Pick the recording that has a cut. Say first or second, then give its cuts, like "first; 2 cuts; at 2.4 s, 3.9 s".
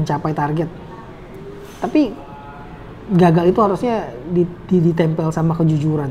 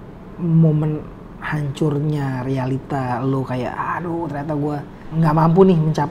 second; 1 cut; at 5.0 s